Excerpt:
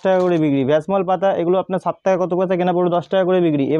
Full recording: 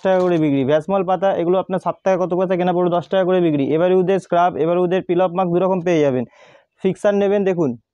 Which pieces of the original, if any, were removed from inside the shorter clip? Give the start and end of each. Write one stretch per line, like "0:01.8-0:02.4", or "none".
none